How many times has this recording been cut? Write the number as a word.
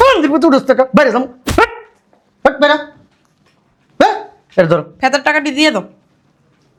zero